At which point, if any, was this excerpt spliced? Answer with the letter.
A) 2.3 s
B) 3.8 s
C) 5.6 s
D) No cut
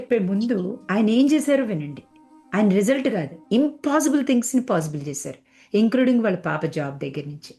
D